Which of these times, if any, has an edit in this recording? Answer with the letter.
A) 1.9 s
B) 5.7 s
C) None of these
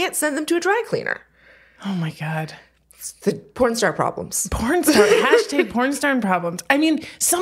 C